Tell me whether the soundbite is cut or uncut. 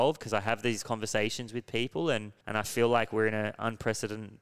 cut